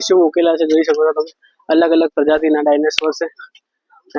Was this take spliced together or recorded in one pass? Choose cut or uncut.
uncut